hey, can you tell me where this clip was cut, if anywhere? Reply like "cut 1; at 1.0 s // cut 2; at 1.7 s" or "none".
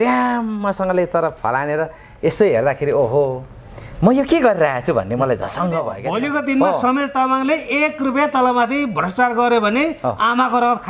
cut 1; at 6.0 s